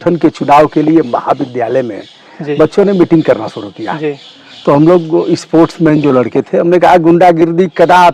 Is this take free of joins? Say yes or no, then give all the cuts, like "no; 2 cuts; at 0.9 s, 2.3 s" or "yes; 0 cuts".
yes; 0 cuts